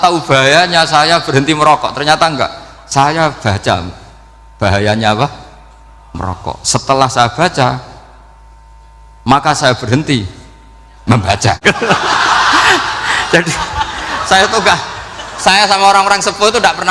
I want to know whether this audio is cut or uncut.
cut